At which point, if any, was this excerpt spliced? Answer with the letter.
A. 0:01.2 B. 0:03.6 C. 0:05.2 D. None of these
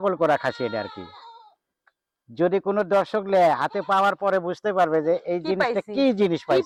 D